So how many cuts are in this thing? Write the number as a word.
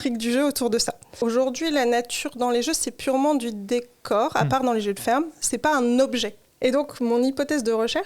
two